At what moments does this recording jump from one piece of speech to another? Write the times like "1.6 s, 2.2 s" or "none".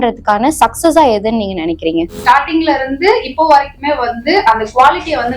2.1 s